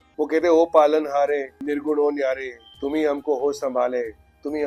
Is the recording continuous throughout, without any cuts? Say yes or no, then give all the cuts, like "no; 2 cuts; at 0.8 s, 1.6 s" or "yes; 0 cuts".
yes; 0 cuts